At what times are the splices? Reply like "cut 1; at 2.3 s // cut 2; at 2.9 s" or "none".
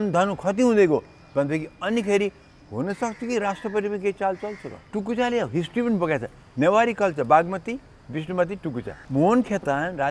cut 1; at 4.9 s // cut 2; at 8.9 s

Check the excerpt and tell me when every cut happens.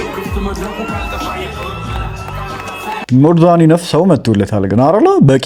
none

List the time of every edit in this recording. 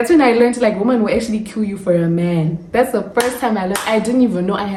none

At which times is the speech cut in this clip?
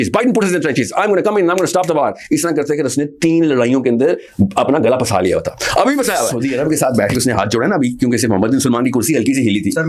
cut 1; at 6.3 s

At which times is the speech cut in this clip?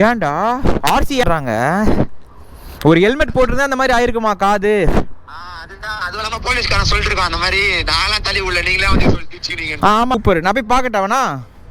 cut 1; at 1.2 s // cut 2; at 10.1 s

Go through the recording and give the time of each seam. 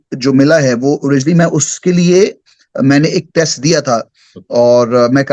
none

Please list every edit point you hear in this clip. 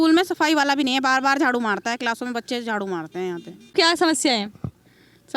cut 1; at 3.6 s

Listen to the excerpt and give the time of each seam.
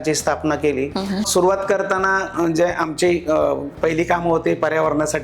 cut 1; at 1.3 s

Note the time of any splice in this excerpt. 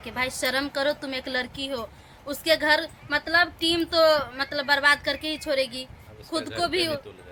none

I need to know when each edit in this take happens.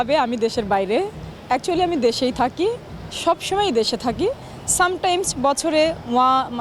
none

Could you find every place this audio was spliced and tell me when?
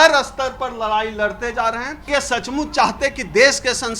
cut 1; at 2.1 s

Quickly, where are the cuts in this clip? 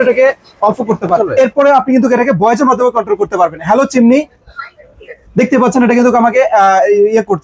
cut 1; at 1.2 s

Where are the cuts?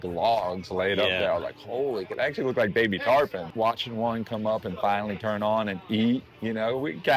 cut 1; at 3.4 s

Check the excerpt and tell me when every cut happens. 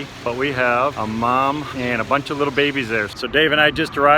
cut 1; at 1.7 s // cut 2; at 3.1 s

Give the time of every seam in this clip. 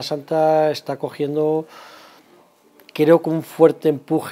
none

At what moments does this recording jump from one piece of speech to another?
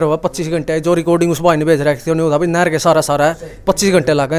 none

